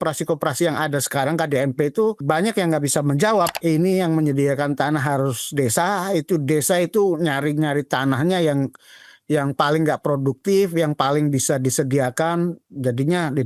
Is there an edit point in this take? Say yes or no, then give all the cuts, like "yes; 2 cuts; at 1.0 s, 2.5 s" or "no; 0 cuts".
yes; 2 cuts; at 2.2 s, 3.5 s